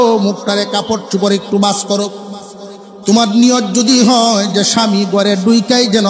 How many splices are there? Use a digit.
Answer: 0